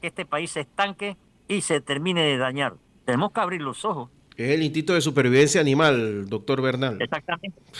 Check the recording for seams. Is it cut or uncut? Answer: cut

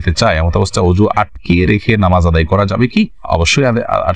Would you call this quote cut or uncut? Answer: uncut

